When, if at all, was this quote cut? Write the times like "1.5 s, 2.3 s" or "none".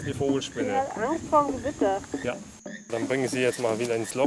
2.9 s